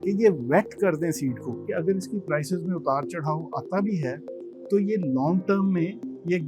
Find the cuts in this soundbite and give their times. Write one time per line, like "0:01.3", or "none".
0:01.6

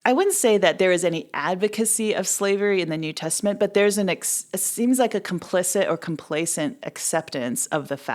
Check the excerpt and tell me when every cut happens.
none

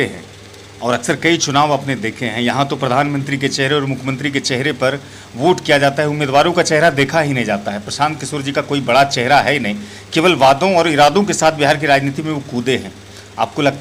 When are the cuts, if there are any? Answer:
none

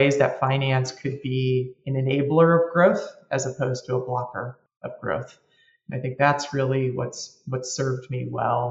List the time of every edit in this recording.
0:04.6

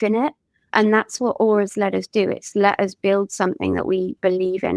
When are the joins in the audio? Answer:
0:02.5

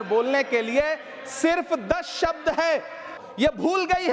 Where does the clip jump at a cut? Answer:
0:03.2

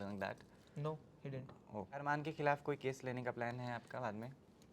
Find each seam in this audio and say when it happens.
0:02.0

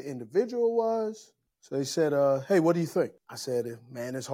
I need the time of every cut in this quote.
0:03.3

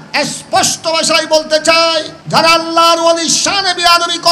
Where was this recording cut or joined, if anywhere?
0:02.2

